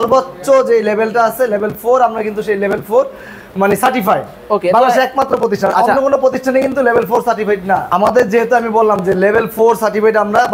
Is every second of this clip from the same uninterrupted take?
no; 1 cut; at 7.8 s

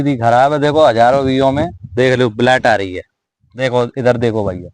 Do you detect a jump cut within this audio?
no; 0 cuts

